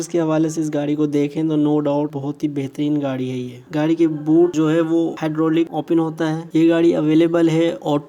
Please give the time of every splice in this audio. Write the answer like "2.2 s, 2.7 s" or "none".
3.7 s, 6.4 s